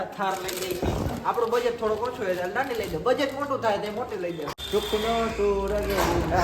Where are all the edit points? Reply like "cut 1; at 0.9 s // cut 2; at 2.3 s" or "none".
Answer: cut 1; at 1.1 s // cut 2; at 4.5 s